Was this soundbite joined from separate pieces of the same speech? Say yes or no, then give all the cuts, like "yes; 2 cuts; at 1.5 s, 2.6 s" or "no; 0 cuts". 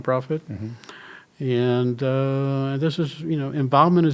no; 0 cuts